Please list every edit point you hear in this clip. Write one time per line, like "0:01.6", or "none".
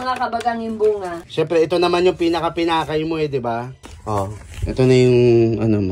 none